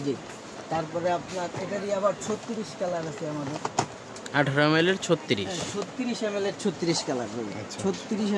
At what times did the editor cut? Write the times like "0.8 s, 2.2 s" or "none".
none